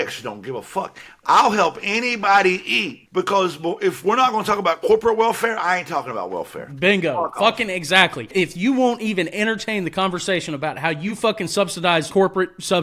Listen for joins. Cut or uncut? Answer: uncut